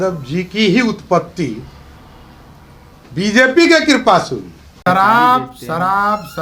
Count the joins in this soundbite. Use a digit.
1